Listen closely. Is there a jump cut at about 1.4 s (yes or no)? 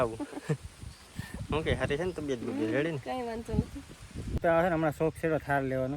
no